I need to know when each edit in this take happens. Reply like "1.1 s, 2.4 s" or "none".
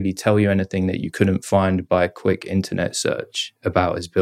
none